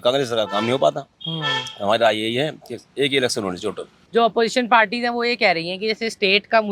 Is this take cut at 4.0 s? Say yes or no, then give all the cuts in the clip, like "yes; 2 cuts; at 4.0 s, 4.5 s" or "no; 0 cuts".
yes; 1 cut; at 4.0 s